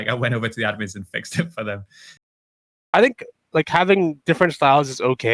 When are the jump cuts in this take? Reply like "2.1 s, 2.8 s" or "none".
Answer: 2.4 s